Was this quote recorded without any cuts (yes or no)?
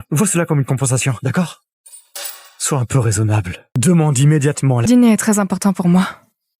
no